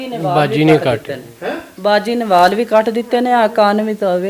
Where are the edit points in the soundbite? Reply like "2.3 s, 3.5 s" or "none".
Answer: none